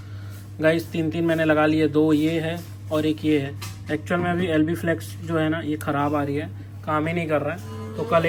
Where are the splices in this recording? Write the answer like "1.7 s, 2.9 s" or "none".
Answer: none